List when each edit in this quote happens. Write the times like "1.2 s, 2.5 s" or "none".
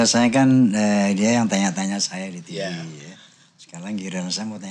none